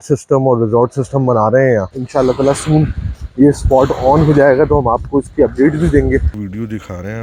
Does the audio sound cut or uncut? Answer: cut